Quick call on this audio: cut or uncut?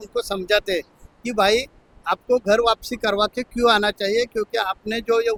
uncut